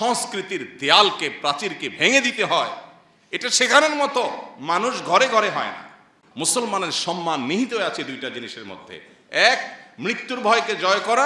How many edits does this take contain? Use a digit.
1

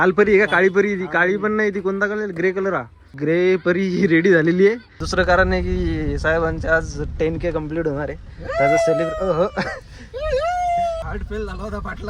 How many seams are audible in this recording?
3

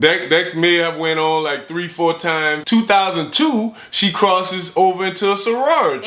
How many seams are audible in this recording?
1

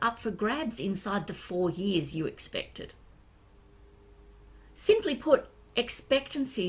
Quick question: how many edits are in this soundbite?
1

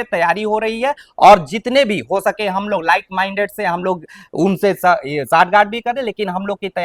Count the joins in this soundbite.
0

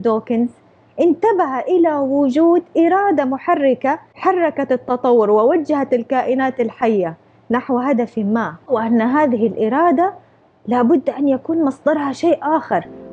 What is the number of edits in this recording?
2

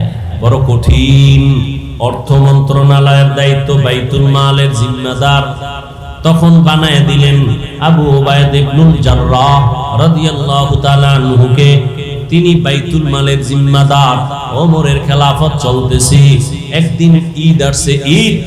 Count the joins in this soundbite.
1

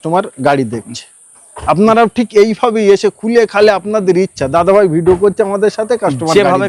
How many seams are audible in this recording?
0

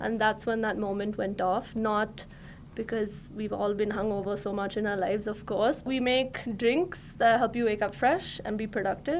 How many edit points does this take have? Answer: 1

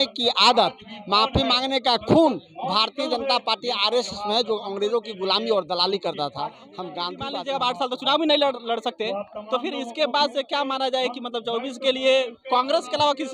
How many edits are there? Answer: 1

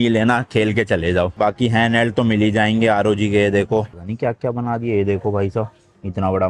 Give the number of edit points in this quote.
2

